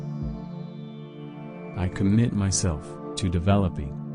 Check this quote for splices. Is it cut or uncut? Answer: cut